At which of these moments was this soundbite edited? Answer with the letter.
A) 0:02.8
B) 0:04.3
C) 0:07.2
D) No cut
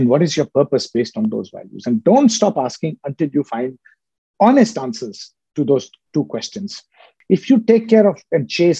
C